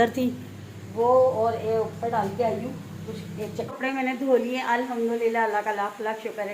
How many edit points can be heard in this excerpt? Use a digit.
1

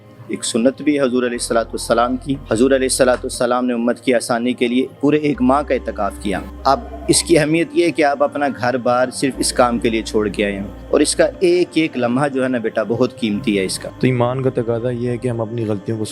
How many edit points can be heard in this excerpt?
3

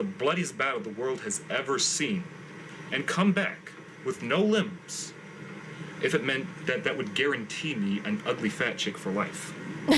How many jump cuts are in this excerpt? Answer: 0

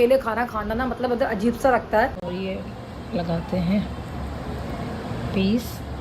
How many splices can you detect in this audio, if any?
1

